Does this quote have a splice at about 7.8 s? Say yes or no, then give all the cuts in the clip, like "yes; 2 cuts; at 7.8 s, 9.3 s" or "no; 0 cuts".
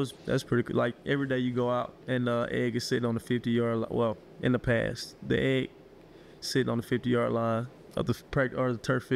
yes; 1 cut; at 7.8 s